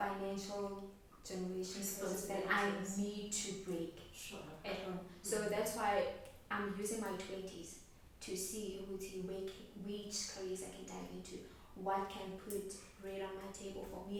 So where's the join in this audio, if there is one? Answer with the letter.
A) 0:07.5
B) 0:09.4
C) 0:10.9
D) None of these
D